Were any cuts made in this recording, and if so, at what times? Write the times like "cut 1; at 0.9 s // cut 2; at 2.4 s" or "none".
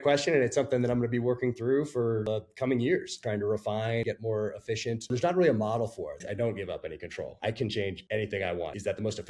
cut 1; at 2.2 s // cut 2; at 3.1 s // cut 3; at 4.0 s // cut 4; at 5.1 s // cut 5; at 6.2 s // cut 6; at 7.3 s // cut 7; at 8.2 s